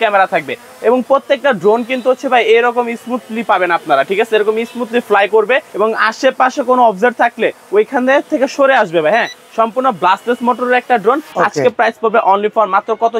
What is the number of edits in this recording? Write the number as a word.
two